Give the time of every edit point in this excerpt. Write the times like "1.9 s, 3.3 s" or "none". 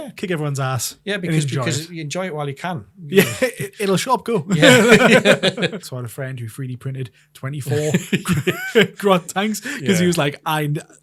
5.9 s